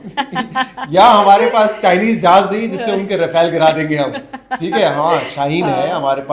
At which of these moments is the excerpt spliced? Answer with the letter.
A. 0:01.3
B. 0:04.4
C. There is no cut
C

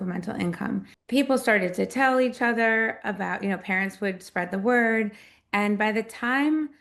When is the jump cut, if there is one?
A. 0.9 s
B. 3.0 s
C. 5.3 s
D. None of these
A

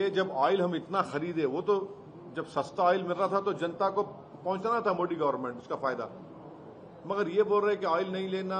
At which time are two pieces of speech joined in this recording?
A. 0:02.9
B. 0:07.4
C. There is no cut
C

